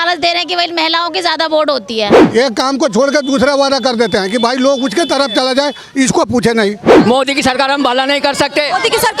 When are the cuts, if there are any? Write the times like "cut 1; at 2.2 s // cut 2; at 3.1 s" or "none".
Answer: cut 1; at 2.2 s // cut 2; at 6.9 s